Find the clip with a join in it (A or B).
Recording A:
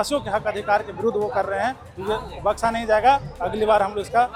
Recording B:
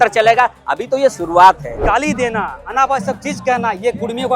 B